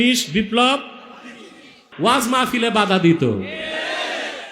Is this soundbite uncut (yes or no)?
no